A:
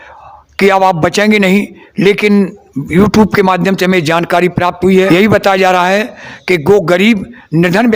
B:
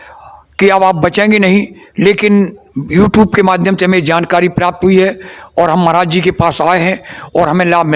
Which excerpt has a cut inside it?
A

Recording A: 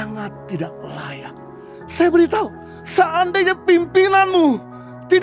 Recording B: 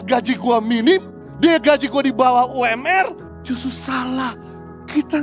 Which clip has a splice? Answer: B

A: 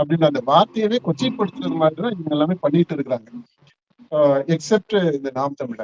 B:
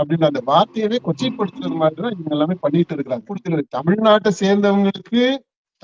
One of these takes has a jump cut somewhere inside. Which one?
B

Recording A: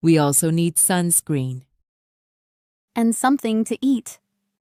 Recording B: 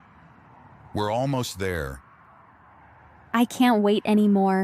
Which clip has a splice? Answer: B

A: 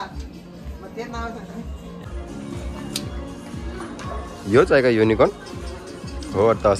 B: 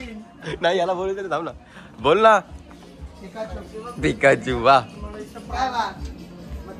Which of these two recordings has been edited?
A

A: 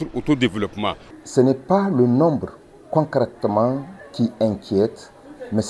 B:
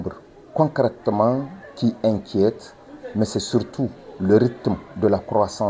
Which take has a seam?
A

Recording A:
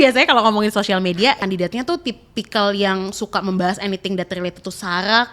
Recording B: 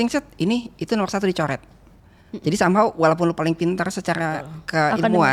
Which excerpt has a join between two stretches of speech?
A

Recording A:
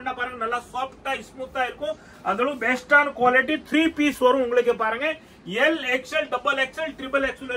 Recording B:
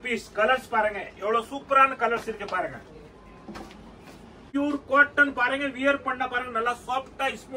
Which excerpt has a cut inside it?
B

